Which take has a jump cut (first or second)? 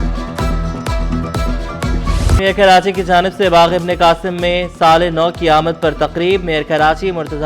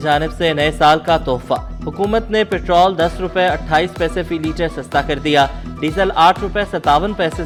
first